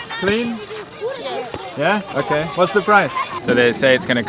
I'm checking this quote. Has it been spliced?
yes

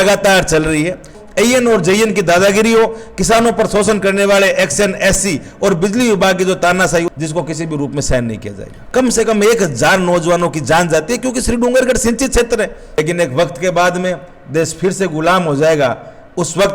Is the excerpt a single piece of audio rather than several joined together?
no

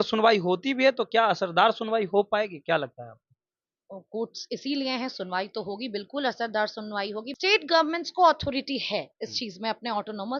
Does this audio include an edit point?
yes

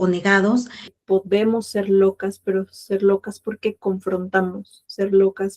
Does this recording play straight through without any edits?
no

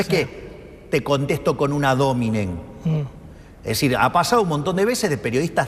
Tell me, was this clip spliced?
no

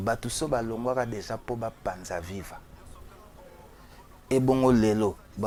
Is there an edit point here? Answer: no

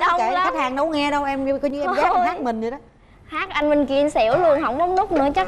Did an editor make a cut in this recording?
no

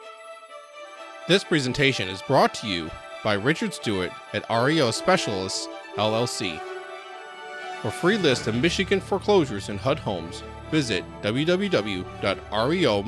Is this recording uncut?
no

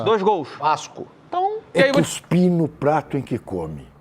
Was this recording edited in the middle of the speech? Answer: yes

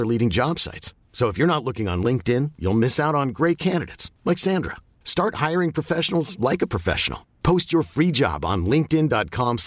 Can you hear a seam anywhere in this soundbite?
no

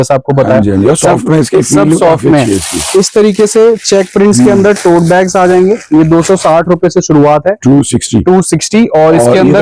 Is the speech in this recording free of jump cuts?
yes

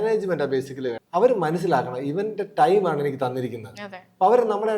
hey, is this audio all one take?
no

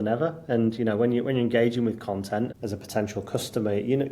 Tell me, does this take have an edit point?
yes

